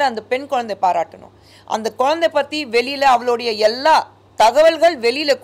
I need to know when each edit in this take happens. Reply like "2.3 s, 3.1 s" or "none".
none